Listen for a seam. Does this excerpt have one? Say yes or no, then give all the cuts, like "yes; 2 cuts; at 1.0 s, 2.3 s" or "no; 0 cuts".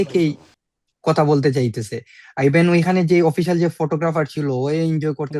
no; 0 cuts